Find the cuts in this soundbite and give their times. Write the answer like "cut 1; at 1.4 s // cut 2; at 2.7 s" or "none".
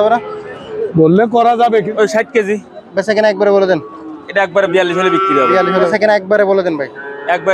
cut 1; at 1.9 s // cut 2; at 5.9 s